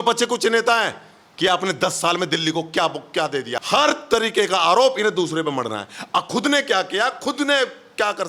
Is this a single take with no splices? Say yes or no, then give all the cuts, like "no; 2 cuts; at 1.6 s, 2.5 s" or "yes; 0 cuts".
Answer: no; 1 cut; at 3.6 s